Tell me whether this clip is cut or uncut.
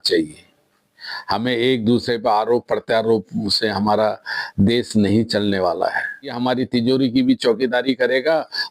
cut